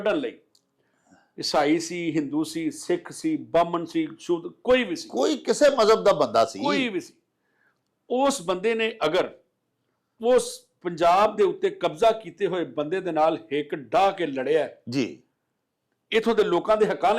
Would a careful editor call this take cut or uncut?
uncut